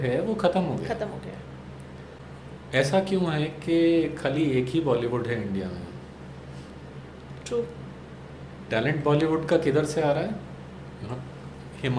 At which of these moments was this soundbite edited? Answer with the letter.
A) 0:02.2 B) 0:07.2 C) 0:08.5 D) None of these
A